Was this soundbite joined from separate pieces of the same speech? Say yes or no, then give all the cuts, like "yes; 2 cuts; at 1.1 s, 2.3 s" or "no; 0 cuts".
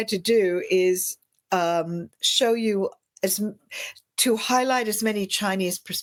no; 0 cuts